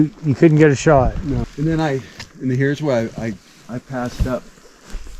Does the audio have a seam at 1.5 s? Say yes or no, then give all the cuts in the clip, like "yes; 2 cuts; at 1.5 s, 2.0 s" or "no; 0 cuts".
yes; 1 cut; at 1.5 s